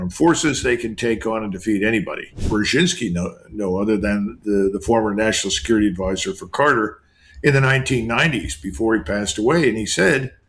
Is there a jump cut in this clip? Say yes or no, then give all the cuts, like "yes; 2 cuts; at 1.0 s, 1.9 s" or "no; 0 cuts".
yes; 1 cut; at 2.4 s